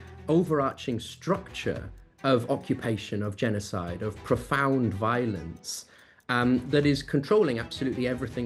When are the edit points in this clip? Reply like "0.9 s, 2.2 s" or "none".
none